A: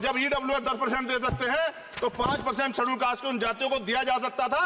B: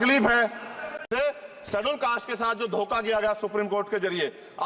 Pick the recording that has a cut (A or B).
B